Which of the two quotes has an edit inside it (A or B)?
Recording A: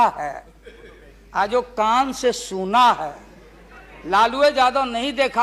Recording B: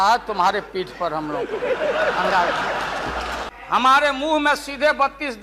B